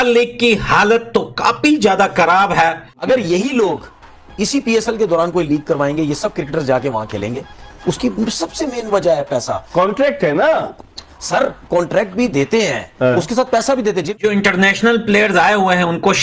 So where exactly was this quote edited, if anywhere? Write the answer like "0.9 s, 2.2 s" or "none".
3.0 s, 14.1 s